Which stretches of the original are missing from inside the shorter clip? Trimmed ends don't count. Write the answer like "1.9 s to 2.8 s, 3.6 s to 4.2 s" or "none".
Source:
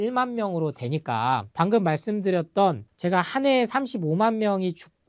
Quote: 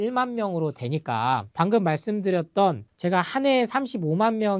none